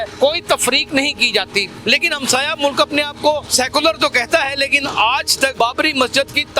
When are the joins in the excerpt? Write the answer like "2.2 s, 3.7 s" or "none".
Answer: 1.7 s, 3.5 s, 5.5 s